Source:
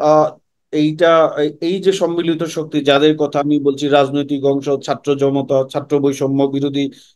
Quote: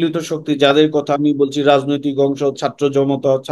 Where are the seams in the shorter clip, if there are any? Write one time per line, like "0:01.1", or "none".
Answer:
none

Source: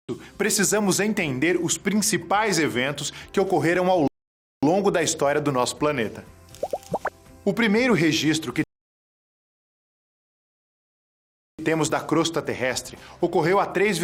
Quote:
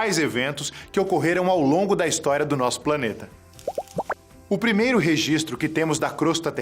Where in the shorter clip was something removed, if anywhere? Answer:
0:01.7
0:05.7

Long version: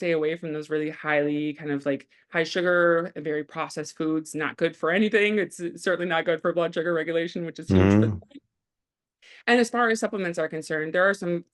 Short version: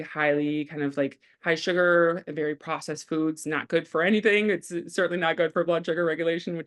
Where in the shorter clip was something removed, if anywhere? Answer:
none

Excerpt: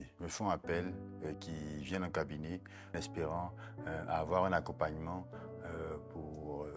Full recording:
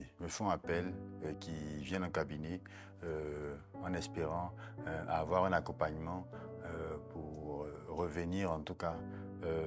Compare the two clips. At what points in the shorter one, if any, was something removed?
0:02.9

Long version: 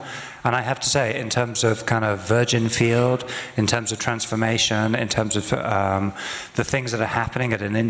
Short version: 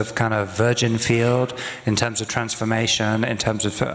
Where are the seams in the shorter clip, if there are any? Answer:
none

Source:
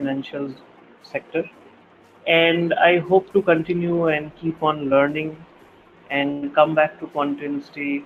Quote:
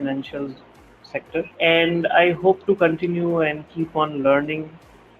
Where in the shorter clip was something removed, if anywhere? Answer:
0:01.5

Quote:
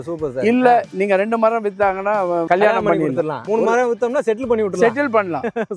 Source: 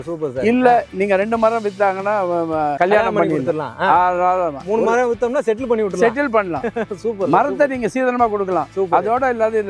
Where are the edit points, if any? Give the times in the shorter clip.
0:02.5
0:03.4

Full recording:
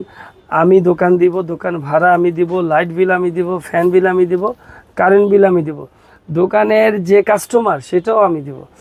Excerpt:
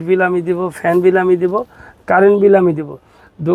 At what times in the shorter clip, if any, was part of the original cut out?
none

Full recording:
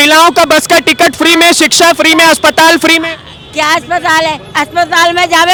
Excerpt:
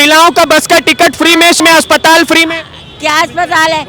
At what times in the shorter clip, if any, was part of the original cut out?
0:01.6

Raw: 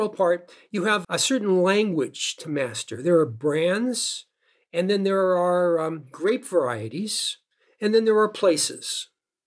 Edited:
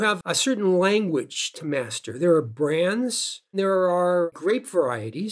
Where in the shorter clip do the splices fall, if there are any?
0:03.5
0:04.3

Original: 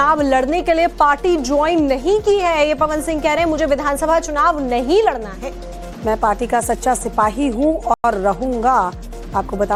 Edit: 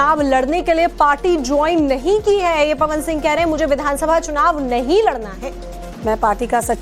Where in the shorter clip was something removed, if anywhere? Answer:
none

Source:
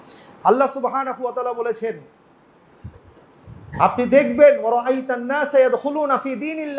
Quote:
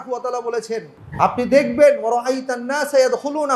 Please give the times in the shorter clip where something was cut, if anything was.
0:01.0

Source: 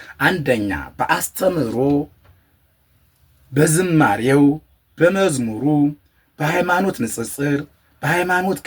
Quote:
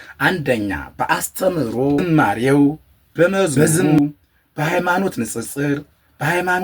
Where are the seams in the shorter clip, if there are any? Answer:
0:02.0

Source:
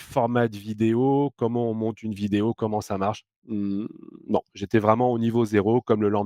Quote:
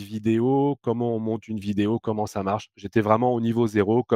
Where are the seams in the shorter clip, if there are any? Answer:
0:02.8

